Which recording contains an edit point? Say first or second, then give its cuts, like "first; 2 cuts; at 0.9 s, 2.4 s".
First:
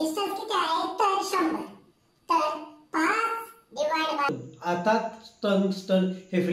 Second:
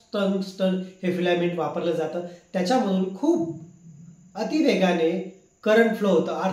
first; 1 cut; at 4.3 s